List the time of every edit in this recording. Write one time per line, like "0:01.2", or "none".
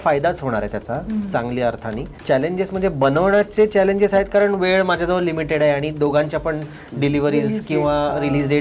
0:02.1